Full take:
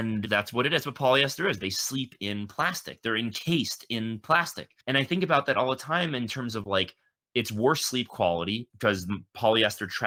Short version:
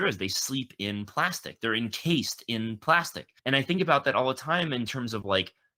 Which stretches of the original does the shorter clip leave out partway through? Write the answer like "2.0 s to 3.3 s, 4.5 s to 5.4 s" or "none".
none